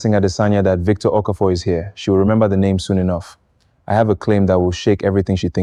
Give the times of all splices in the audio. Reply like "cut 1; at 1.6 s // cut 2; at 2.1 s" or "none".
none